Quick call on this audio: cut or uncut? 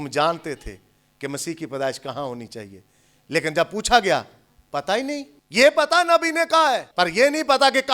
cut